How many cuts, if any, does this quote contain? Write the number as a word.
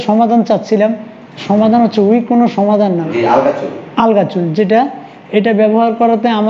one